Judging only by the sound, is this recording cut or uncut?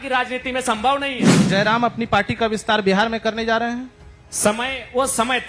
cut